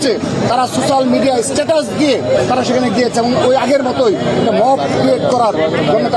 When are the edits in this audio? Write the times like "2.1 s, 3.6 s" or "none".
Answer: none